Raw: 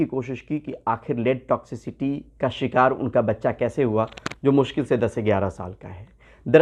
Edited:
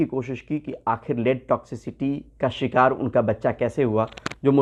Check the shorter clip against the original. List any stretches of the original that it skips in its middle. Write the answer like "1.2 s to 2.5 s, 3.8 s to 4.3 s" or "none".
none